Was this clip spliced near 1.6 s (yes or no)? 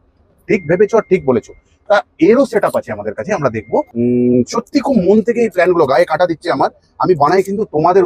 no